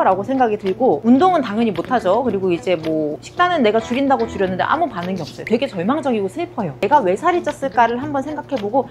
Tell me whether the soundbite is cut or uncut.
cut